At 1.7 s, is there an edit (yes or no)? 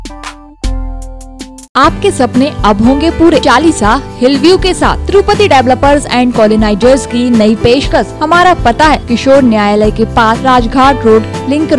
yes